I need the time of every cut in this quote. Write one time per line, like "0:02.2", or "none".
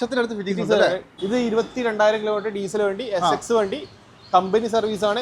0:01.1

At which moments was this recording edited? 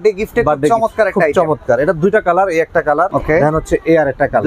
0:03.1

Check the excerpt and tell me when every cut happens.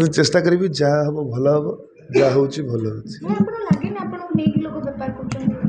none

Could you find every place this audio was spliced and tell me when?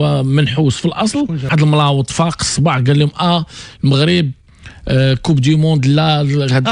0:01.4

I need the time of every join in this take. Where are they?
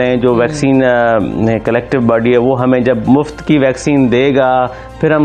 none

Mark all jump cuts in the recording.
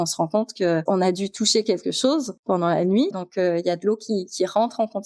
0:02.3
0:03.1

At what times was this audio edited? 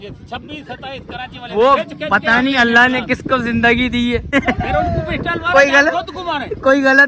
0:04.3

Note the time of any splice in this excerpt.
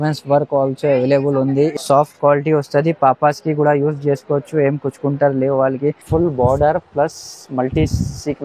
0:01.7
0:06.0

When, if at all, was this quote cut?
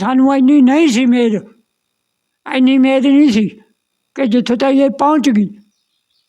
none

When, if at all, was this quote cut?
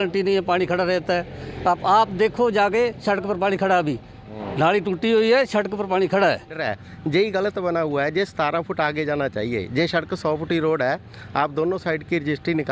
0:06.6

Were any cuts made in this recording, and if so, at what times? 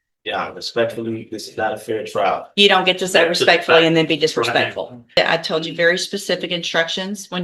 0:05.2

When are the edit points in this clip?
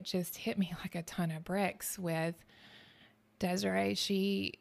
none

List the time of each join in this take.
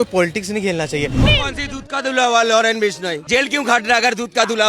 0:01.2
0:03.1

